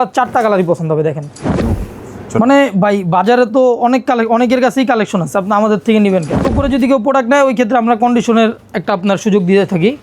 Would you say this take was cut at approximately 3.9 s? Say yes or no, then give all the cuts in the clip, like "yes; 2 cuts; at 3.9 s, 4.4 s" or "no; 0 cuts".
no; 2 cuts; at 1.8 s, 6.5 s